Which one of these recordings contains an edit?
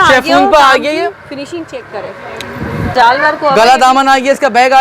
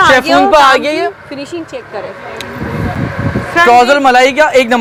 first; 1 cut; at 2.9 s

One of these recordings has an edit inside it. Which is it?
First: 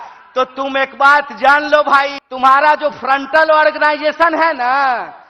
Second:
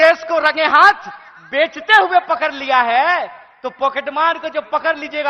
first; 1 cut; at 2.2 s

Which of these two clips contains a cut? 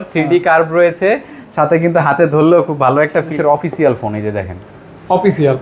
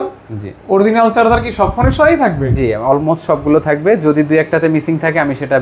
first; 1 cut; at 3.3 s

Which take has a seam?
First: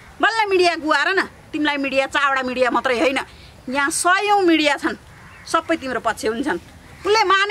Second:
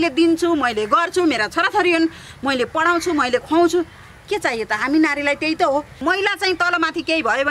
second; 1 cut; at 5.9 s

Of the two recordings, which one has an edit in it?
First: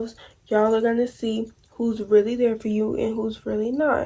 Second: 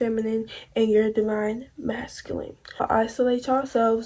second; 1 cut; at 2.8 s

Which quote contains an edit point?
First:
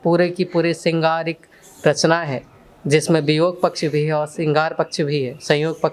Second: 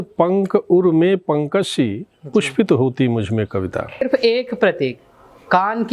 second; 1 cut; at 4.0 s

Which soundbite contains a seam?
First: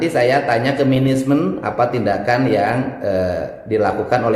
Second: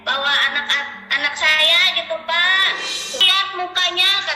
second; 1 cut; at 3.2 s

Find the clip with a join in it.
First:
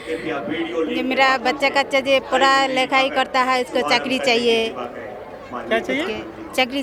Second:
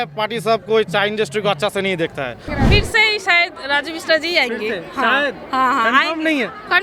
second; 1 cut; at 2.5 s

